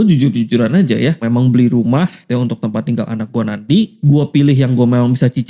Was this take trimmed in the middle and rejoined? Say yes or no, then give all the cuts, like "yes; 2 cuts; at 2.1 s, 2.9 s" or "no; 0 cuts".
yes; 3 cuts; at 1.2 s, 2.2 s, 4.0 s